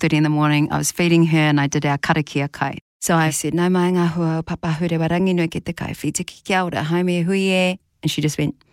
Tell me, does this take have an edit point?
yes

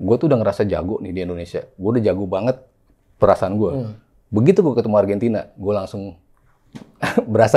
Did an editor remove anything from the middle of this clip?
no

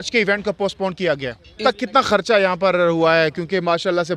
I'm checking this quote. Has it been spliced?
yes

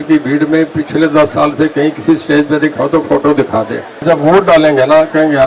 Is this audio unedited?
no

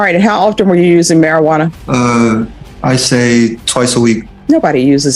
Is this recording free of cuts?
no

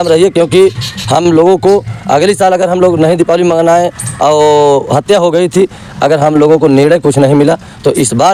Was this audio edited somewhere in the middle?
no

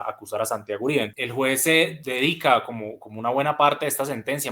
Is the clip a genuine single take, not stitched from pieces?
no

